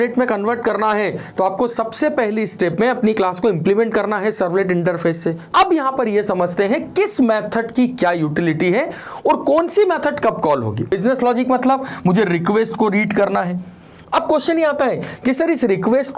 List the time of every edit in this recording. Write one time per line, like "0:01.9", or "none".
0:05.5
0:10.9

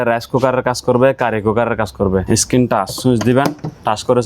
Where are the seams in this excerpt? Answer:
0:02.2

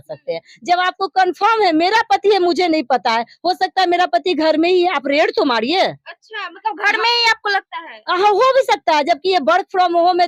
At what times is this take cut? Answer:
none

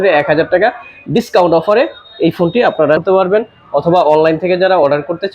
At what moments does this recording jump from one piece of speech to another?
0:03.0

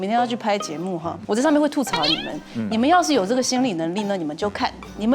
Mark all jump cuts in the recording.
0:01.1

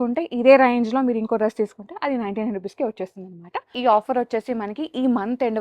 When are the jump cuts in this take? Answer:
0:03.7

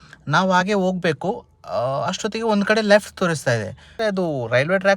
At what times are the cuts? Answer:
0:04.0

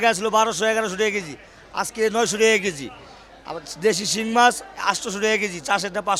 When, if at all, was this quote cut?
none

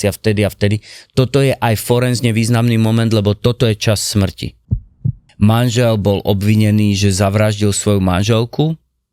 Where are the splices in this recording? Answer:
0:04.8

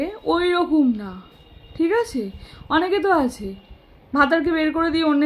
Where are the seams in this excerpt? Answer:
none

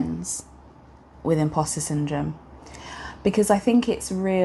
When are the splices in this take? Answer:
none

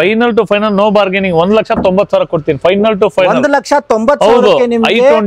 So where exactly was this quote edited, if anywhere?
none

